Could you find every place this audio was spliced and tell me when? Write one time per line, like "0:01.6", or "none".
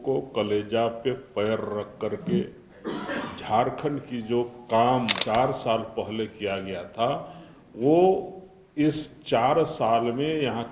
0:05.2

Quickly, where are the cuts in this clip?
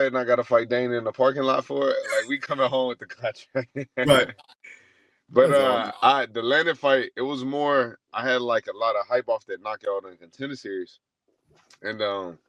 none

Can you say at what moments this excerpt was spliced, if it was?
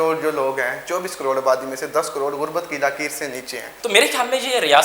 0:03.8

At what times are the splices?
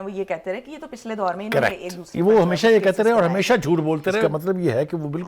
0:04.2

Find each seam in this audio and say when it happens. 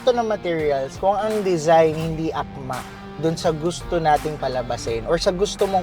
0:00.9

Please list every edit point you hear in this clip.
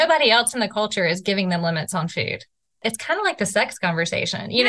0:02.8

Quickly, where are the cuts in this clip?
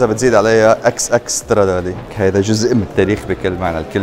0:02.0

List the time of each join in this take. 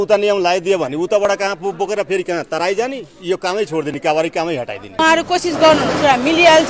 0:05.0

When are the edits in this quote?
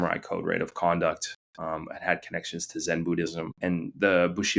0:03.5

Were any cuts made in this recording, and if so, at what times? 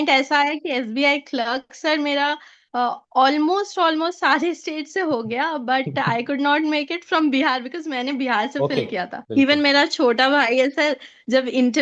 0:09.2

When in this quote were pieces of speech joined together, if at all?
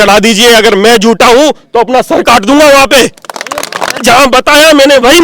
0:04.0

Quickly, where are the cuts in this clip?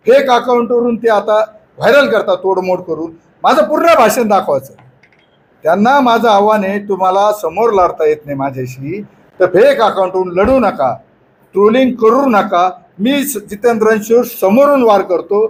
none

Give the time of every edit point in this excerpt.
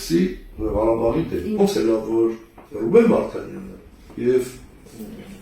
0:01.6

